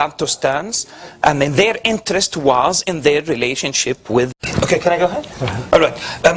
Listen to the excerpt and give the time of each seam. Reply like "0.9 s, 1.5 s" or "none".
none